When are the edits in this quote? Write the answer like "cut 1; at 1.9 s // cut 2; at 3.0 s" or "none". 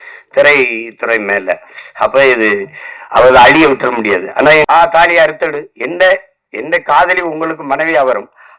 cut 1; at 4.6 s